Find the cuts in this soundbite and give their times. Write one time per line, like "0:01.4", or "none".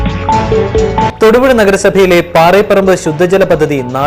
none